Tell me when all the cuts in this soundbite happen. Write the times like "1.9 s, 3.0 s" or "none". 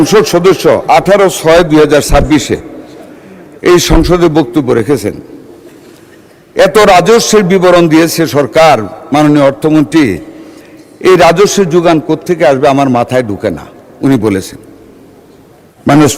none